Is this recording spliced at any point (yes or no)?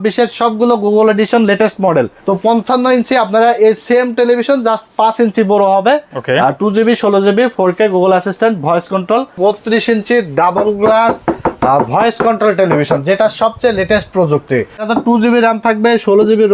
yes